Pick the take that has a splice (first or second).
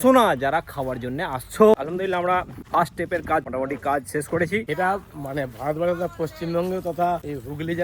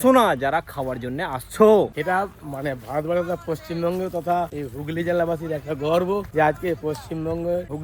first